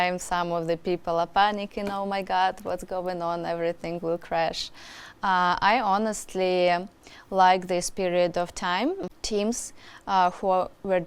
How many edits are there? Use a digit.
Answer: 1